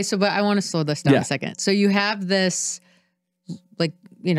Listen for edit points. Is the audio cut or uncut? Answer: uncut